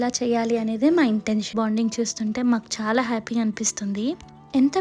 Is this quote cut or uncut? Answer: cut